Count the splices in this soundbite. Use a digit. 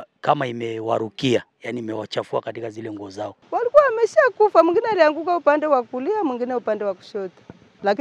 1